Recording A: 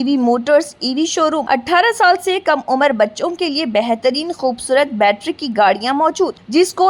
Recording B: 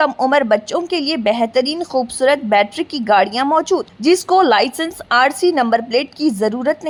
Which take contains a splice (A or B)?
A